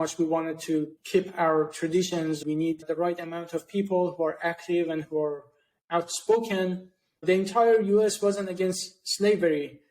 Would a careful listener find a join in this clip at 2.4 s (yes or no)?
yes